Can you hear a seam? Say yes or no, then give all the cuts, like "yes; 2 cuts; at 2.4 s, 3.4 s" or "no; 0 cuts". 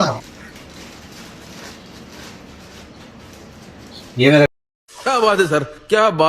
yes; 1 cut; at 4.5 s